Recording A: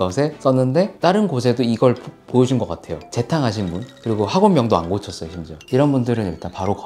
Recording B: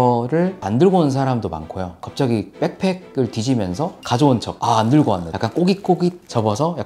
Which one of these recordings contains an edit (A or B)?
B